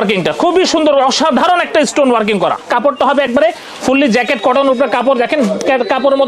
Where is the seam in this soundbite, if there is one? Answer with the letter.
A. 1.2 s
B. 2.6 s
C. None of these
B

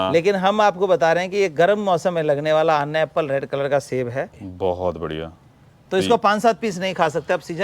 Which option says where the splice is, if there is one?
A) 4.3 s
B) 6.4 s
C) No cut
A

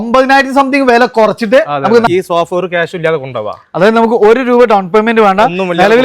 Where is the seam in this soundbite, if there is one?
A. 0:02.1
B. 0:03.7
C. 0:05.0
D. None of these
A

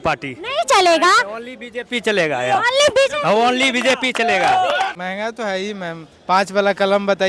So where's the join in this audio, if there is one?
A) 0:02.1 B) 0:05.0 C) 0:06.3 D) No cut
B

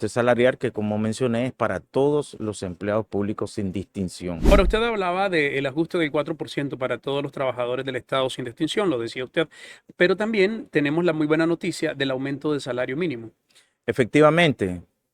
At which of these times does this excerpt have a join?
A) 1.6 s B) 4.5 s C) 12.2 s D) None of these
B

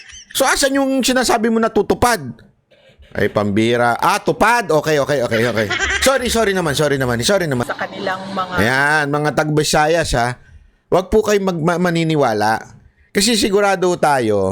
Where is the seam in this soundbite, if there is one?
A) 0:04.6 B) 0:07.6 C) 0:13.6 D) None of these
B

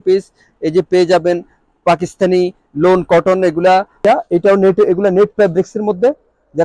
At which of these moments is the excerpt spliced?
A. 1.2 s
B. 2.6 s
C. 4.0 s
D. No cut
C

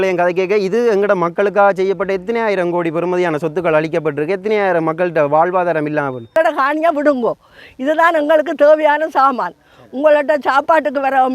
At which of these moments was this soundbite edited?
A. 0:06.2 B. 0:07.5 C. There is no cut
A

